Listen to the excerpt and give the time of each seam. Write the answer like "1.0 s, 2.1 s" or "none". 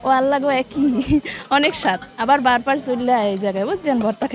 none